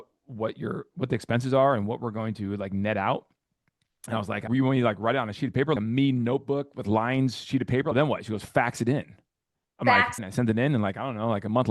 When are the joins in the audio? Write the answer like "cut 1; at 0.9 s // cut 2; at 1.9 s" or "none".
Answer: cut 1; at 4.5 s // cut 2; at 5.8 s // cut 3; at 7.9 s // cut 4; at 10.2 s